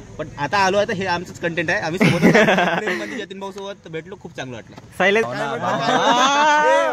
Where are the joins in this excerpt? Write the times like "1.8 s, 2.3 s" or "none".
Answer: 5.3 s